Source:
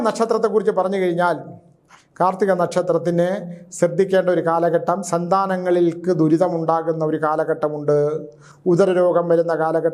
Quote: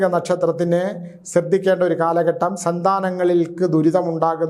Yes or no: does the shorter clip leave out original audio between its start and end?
no